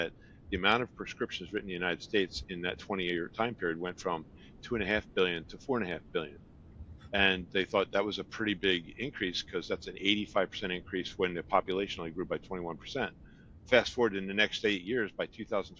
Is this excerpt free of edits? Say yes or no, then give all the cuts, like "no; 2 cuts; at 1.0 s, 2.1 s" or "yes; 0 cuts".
yes; 0 cuts